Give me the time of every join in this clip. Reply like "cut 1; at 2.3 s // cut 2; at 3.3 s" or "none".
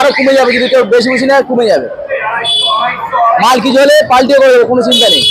none

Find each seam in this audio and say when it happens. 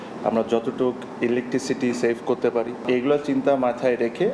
cut 1; at 2.8 s

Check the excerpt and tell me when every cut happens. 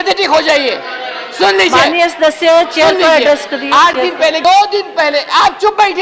cut 1; at 4.4 s

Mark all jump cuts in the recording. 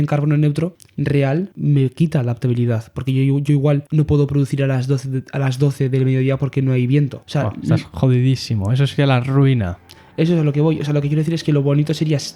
none

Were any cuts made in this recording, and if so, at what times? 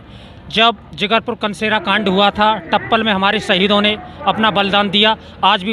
none

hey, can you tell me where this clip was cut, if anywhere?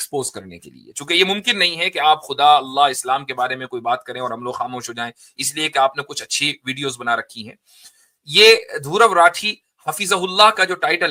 none

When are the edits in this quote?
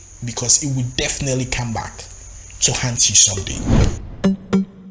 cut 1; at 3.3 s

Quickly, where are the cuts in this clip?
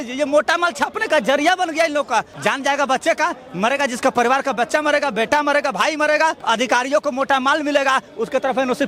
cut 1; at 2.3 s // cut 2; at 6.4 s

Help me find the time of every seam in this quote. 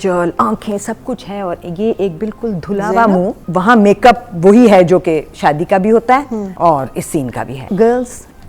cut 1; at 3.4 s // cut 2; at 6.5 s // cut 3; at 7.7 s

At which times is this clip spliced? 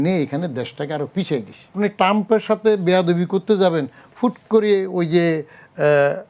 cut 1; at 1.8 s

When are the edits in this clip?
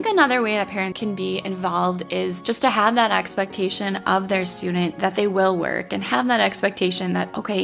cut 1; at 0.9 s

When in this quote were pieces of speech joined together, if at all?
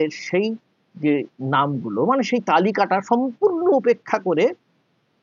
none

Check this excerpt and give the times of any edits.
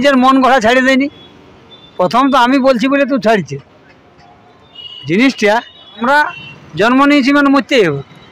cut 1; at 6.0 s

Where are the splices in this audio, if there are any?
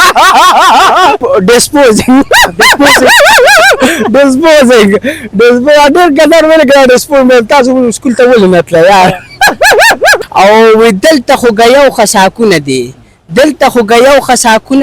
cut 1; at 1.2 s // cut 2; at 10.2 s

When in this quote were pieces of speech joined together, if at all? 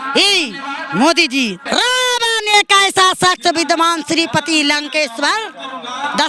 cut 1; at 1.6 s

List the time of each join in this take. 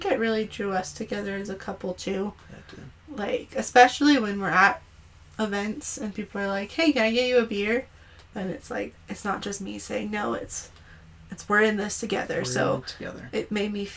none

